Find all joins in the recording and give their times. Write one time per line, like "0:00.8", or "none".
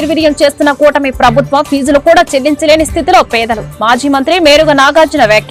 none